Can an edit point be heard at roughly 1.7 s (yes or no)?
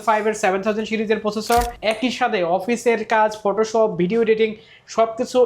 yes